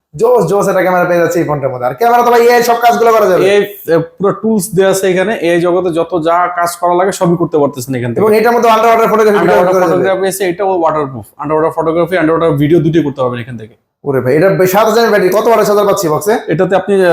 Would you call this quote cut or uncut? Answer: uncut